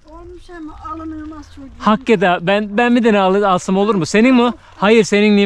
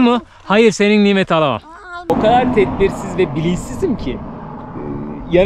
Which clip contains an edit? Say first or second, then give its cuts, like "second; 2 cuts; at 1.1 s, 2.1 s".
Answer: second; 1 cut; at 2.1 s